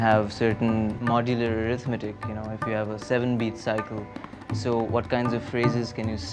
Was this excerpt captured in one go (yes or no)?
no